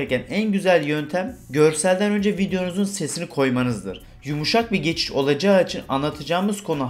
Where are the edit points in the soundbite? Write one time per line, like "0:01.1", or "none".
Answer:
0:01.4
0:04.0